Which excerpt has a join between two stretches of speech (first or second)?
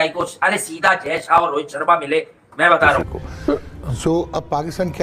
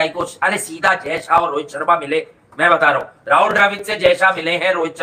first